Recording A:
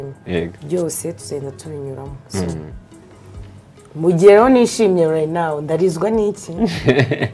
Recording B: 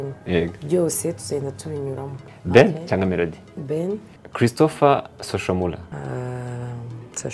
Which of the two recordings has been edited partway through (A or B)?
B